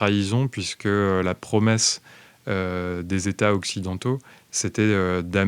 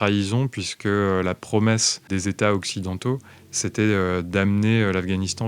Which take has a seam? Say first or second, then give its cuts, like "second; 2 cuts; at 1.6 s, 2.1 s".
second; 1 cut; at 2.0 s